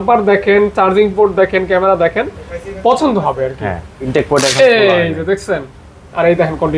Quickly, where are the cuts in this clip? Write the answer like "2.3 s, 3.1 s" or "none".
4.1 s